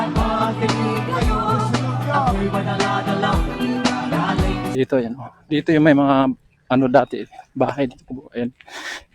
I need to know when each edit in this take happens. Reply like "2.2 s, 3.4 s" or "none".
4.7 s